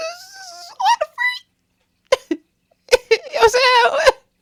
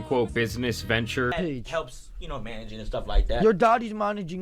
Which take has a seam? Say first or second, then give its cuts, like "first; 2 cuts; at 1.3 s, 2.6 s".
second; 1 cut; at 1.3 s